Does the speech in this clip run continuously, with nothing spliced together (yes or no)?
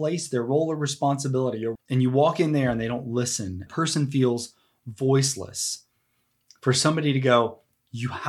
no